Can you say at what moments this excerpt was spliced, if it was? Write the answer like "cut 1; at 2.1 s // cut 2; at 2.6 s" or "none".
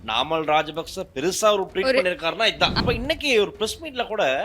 cut 1; at 2.8 s